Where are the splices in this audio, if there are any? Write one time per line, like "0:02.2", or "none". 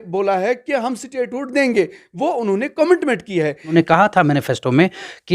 0:03.7